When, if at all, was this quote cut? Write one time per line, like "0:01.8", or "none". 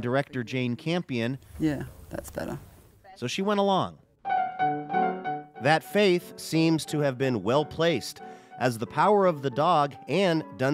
0:04.0